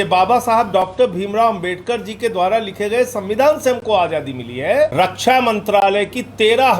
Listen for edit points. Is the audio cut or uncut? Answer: cut